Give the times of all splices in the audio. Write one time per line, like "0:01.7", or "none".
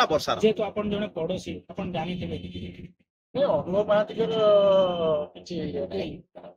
none